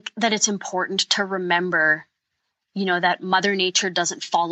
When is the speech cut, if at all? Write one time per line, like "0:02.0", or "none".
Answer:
none